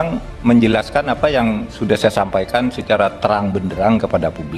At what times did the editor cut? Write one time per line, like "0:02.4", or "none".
0:03.2

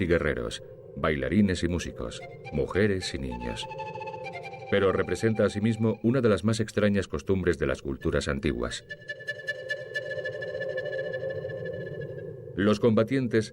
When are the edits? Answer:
0:03.3

